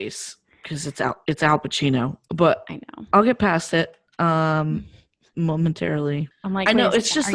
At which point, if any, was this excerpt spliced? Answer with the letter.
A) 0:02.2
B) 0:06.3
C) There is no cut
B